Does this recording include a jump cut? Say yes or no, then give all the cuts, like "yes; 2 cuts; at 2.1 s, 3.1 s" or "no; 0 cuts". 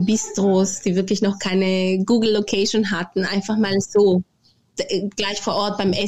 no; 0 cuts